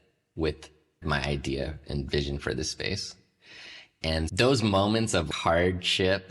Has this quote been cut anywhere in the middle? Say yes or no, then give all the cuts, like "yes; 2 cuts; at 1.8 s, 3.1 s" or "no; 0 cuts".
yes; 3 cuts; at 1.0 s, 4.3 s, 5.3 s